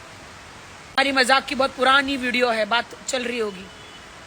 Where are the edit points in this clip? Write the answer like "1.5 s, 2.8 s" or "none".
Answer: 1.0 s